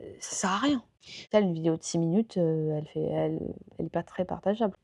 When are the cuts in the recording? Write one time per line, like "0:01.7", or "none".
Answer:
0:01.2